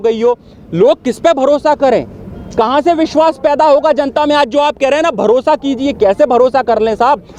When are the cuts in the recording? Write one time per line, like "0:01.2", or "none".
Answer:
none